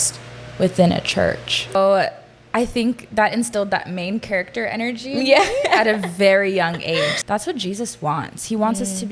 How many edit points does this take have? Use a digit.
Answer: 2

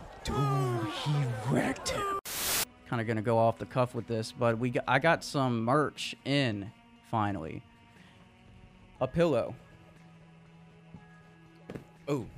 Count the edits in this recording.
1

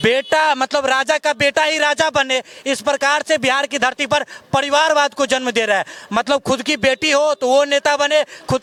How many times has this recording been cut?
0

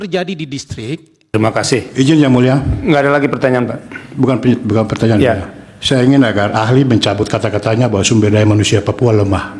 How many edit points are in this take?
1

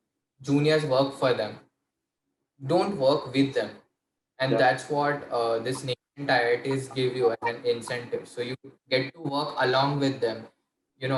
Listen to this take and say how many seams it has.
0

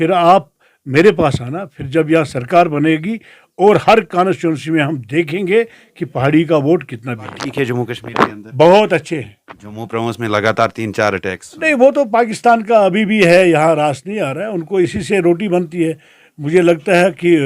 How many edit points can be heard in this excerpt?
1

